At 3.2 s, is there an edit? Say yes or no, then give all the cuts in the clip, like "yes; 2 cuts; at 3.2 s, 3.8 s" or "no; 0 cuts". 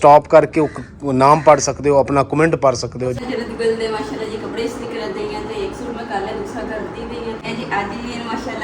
yes; 2 cuts; at 3.2 s, 7.4 s